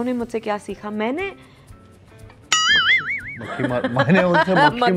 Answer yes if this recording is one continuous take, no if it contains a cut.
yes